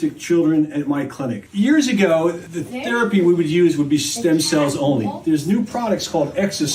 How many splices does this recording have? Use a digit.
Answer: 1